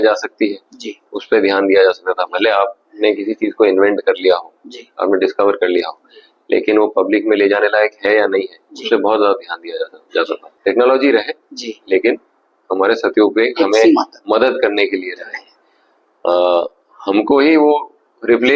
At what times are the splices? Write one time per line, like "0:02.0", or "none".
0:10.4